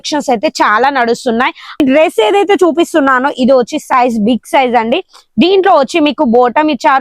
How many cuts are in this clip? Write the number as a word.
one